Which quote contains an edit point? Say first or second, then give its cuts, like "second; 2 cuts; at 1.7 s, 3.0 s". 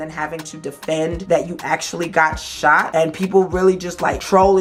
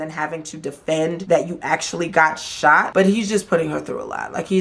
second; 1 cut; at 2.9 s